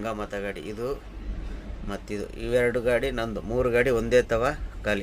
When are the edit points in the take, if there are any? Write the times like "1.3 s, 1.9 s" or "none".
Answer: none

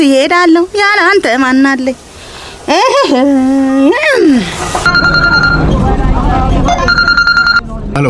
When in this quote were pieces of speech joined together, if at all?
4.9 s

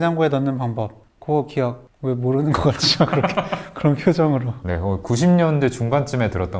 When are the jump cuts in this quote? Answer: 1.1 s

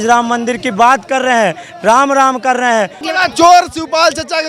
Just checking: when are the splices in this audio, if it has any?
3.0 s

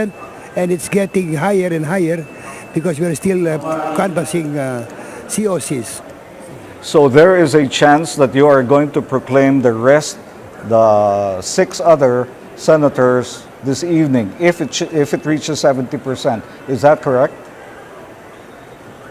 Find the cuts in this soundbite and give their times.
17.7 s

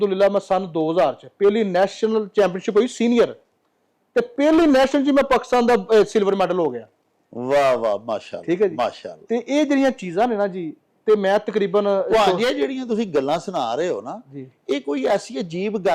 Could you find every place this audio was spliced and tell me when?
none

